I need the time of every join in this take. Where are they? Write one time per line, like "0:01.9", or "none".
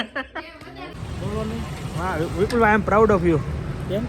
0:01.0